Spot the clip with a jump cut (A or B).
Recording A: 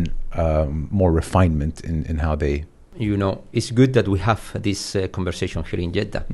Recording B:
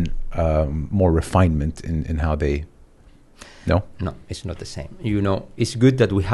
A